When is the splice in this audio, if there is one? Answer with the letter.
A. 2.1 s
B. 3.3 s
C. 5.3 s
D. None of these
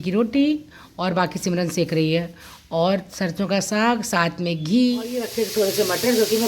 C